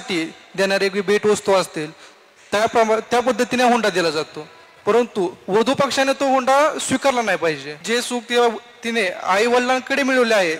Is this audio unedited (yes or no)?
no